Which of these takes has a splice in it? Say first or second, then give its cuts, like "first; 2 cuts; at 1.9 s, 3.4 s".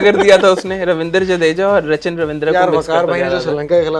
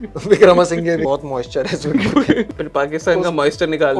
second; 2 cuts; at 1.0 s, 2.5 s